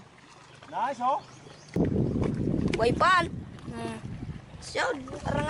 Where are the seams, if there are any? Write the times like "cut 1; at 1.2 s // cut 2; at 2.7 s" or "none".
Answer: cut 1; at 1.8 s